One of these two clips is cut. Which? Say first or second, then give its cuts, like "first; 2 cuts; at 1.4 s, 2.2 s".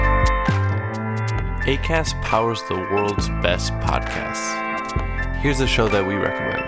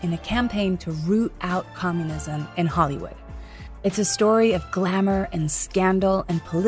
first; 1 cut; at 0.9 s